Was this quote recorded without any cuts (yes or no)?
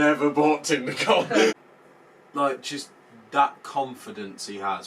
no